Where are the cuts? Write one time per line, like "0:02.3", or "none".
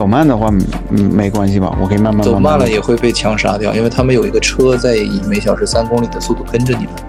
none